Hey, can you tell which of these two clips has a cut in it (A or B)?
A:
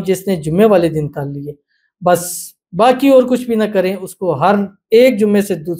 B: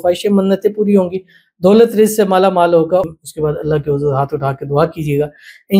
B